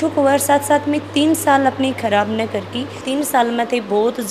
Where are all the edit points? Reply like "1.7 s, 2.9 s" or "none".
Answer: none